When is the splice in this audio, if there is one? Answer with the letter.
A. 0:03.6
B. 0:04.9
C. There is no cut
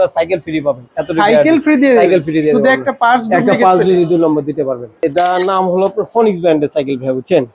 B